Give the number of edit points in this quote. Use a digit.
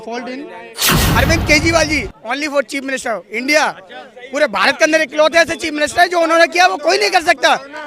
1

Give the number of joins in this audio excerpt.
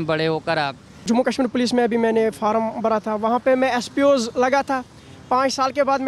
1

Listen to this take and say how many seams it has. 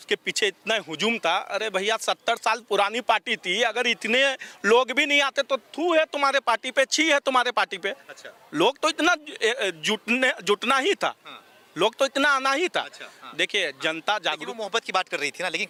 0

